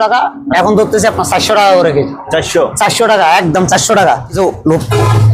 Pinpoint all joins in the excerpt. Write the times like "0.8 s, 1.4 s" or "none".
4.3 s